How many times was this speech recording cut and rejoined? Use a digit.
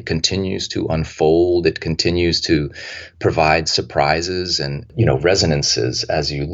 1